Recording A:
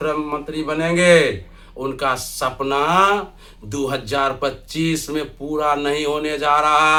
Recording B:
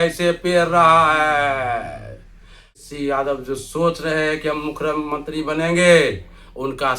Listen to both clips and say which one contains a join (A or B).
B